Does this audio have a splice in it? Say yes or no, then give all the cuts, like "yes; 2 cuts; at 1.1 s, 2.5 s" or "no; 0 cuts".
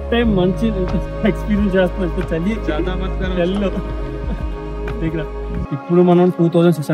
yes; 1 cut; at 5.7 s